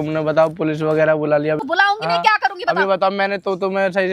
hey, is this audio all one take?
no; 1 cut; at 1.6 s

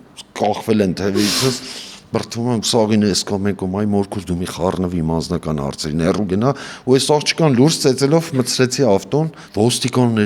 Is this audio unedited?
yes; 0 cuts

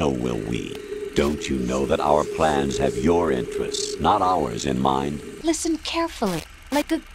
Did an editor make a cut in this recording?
yes; 2 cuts; at 0.9 s, 5.3 s

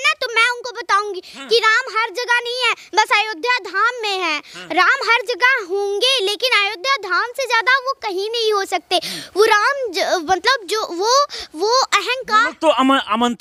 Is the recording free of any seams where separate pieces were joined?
yes; 0 cuts

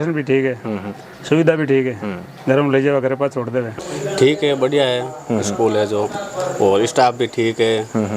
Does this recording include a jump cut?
yes; 1 cut; at 3.8 s

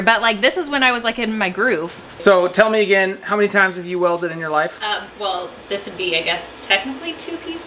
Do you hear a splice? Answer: yes; 1 cut; at 2.0 s

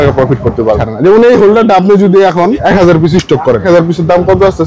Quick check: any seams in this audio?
yes; 3 cuts; at 0.9 s, 2.6 s, 3.6 s

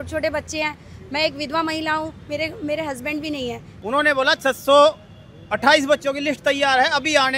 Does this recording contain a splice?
yes; 1 cut; at 3.7 s

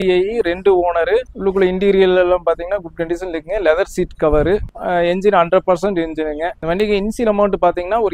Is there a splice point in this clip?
yes; 3 cuts; at 1.2 s, 4.7 s, 6.5 s

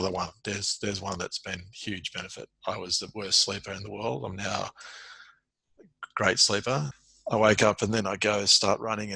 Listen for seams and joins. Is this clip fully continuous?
no; 1 cut; at 7.0 s

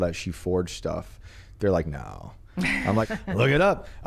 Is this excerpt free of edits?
no; 1 cut; at 3.1 s

